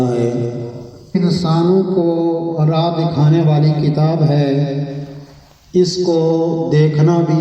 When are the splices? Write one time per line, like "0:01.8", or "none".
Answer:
0:01.2

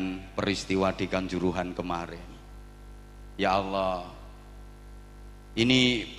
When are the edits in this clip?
none

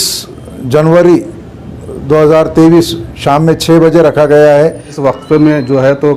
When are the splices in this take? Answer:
0:04.9

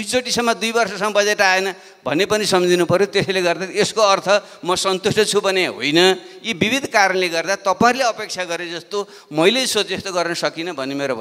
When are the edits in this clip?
none

